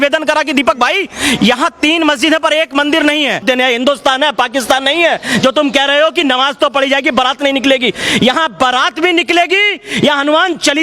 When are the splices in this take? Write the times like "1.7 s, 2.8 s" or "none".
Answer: 3.4 s

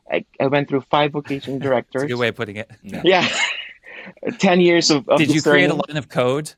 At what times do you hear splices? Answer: none

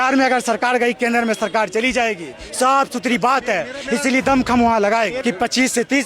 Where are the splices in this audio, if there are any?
5.2 s

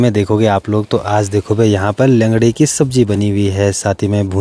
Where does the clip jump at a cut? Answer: none

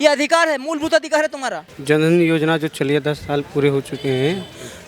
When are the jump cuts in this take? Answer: none

